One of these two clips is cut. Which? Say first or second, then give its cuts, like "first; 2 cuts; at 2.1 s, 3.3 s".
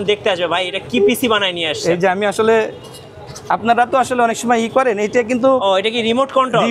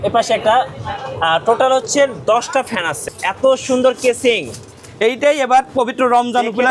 second; 1 cut; at 2.9 s